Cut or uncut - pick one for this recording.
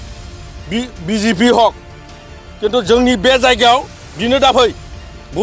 uncut